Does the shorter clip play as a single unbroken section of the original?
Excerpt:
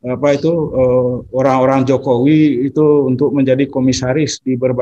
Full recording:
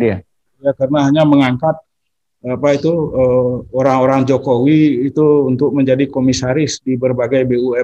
yes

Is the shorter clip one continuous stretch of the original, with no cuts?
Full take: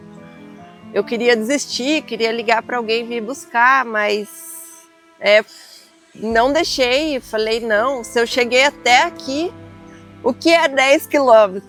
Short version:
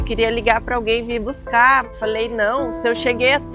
no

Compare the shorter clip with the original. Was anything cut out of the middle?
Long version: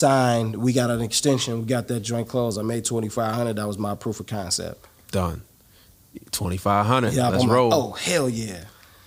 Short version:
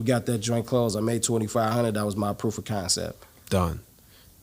no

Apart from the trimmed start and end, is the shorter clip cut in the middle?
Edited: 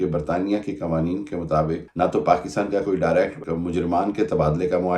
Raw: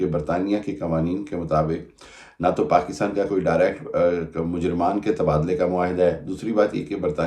yes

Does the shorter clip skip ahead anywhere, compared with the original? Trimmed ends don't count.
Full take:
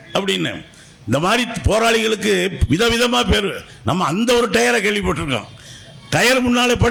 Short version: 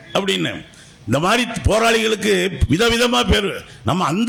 no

